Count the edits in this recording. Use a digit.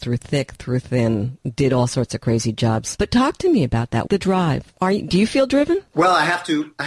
2